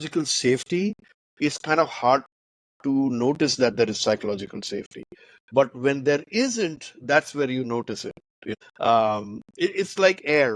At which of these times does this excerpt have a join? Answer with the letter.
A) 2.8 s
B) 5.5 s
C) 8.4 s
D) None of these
C